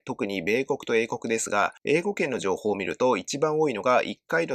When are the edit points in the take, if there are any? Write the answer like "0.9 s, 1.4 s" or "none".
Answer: none